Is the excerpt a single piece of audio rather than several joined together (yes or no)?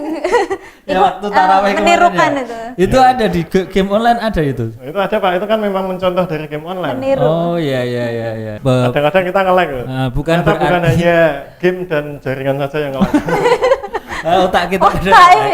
no